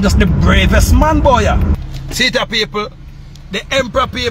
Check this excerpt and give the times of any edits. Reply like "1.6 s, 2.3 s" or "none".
1.7 s